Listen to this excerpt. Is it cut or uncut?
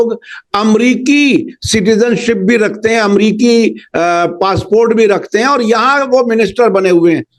uncut